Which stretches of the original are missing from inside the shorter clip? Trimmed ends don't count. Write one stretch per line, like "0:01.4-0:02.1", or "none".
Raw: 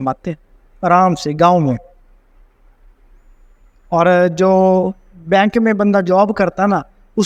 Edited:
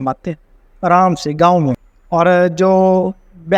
0:01.9-0:03.7